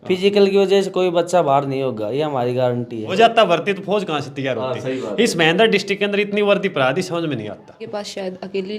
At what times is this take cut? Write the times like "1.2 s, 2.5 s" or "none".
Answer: 3.2 s, 7.8 s